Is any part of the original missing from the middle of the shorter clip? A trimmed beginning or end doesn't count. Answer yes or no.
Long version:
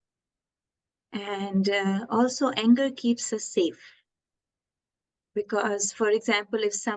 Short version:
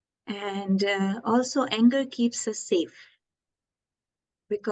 no